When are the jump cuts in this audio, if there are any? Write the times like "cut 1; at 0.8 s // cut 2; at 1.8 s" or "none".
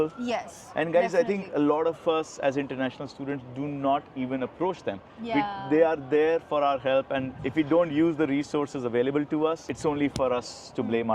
cut 1; at 9.6 s